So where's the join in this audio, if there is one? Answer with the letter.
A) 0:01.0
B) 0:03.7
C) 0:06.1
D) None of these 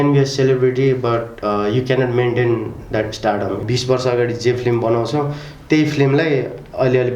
B